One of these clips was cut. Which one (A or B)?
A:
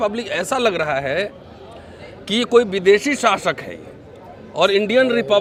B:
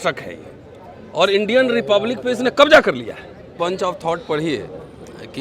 B